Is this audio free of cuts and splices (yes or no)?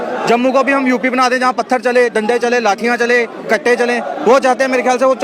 yes